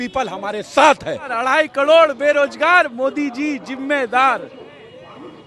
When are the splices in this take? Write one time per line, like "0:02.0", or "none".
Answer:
0:01.3